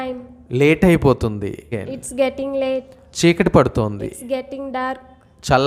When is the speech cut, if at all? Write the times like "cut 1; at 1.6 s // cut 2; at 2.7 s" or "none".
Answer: cut 1; at 1.9 s // cut 2; at 3.0 s